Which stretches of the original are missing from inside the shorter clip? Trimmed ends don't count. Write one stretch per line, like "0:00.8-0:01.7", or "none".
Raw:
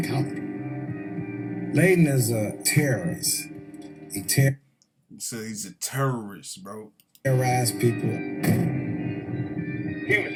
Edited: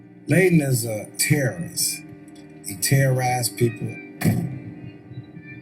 0:04.5-0:07.3